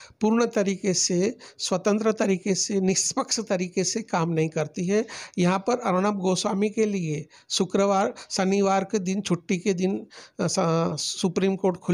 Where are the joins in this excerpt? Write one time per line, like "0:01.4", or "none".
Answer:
none